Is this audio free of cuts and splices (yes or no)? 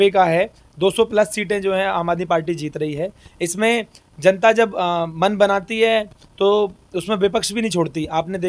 yes